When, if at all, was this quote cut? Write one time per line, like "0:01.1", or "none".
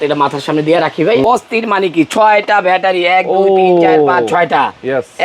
0:01.2